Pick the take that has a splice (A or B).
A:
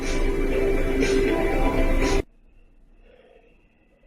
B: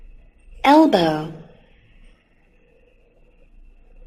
A